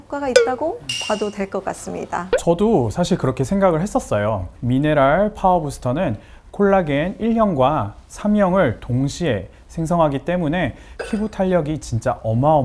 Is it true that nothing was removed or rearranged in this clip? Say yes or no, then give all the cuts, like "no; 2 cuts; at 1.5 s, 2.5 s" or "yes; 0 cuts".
yes; 0 cuts